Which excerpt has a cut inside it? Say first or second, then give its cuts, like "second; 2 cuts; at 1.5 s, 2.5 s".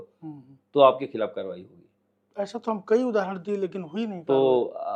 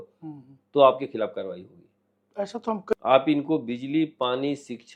second; 1 cut; at 2.9 s